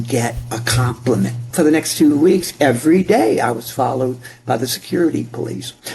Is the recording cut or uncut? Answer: cut